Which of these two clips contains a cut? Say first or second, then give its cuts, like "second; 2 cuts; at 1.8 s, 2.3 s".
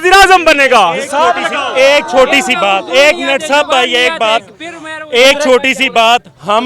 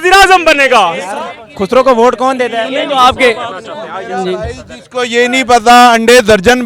second; 1 cut; at 1.1 s